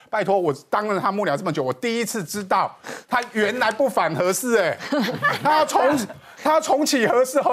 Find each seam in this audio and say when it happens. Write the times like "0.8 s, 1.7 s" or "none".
none